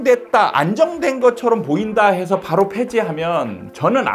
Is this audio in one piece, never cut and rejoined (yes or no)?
yes